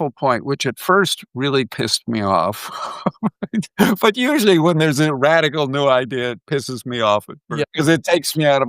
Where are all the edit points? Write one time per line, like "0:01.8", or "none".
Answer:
0:07.6